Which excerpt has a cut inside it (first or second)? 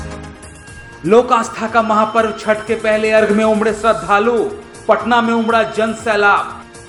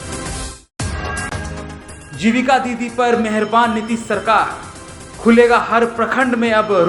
second